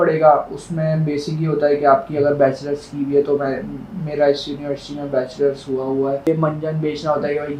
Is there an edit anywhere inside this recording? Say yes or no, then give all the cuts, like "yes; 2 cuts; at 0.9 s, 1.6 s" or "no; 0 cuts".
yes; 1 cut; at 6.3 s